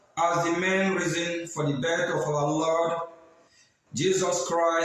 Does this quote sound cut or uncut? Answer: cut